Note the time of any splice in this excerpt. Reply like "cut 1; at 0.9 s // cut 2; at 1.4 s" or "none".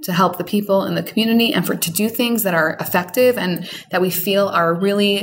none